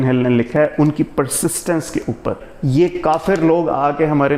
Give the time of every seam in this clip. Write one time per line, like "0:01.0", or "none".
0:02.5